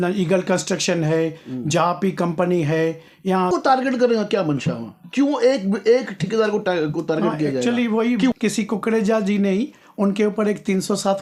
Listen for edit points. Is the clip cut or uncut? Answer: cut